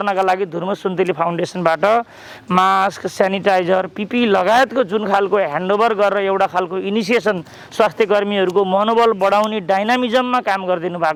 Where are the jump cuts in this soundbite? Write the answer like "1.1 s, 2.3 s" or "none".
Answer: none